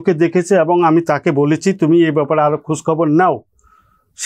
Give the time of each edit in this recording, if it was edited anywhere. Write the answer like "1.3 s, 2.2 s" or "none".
none